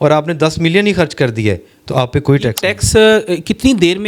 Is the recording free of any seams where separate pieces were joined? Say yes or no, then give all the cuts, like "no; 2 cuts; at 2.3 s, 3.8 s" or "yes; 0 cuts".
no; 1 cut; at 2.7 s